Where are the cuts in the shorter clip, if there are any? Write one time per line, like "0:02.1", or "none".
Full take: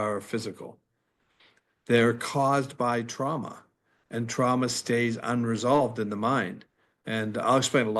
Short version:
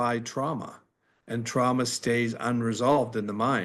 none